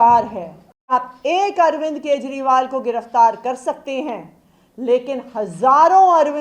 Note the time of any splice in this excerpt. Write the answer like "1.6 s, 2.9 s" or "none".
0.9 s